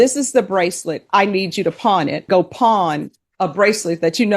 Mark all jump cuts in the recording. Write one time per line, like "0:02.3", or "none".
0:02.2